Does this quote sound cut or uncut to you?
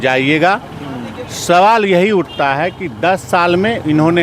uncut